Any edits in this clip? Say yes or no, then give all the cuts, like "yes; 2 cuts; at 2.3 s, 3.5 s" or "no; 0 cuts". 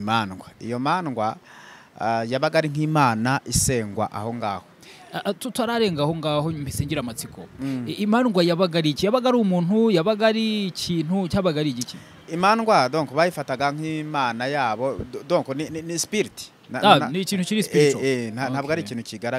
no; 0 cuts